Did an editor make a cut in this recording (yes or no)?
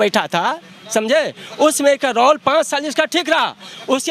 no